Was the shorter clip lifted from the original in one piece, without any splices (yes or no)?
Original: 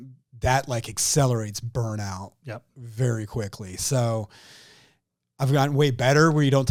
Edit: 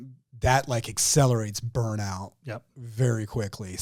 yes